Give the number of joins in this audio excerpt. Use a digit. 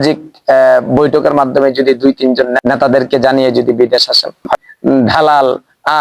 2